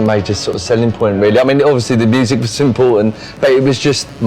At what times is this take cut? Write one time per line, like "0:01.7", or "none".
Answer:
none